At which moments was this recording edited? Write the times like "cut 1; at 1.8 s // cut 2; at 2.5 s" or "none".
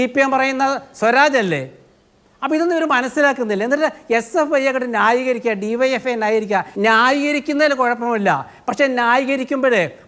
cut 1; at 6.7 s